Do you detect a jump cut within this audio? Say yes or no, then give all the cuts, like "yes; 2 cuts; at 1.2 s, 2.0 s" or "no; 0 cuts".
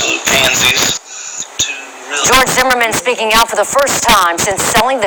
yes; 1 cut; at 4.0 s